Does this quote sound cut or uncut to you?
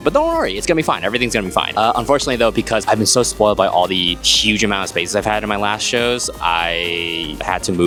uncut